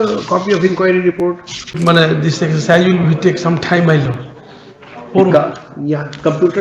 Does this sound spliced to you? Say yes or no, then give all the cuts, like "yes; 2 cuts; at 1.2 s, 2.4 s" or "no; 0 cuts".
yes; 1 cut; at 1.8 s